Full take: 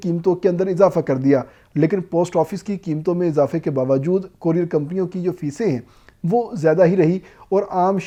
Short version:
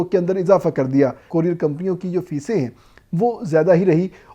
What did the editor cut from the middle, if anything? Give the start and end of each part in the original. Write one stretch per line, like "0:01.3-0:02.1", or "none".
0:01.5-0:04.3